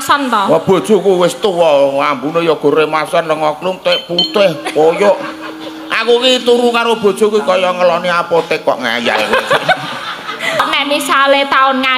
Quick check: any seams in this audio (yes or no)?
yes